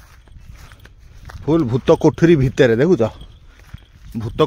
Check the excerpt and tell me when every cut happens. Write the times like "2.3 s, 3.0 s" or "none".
none